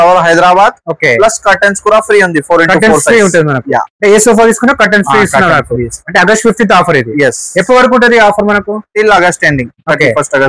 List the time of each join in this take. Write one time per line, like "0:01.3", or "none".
none